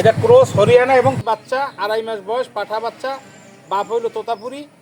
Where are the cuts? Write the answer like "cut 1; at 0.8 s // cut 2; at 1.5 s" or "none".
cut 1; at 1.2 s